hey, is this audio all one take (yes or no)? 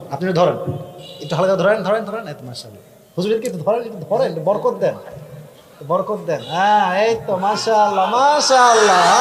yes